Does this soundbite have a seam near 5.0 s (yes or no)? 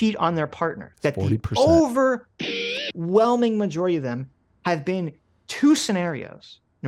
no